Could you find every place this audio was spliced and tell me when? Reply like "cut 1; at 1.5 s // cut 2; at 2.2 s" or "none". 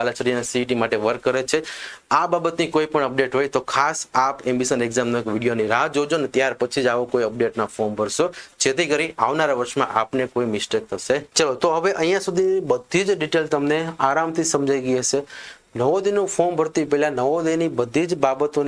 none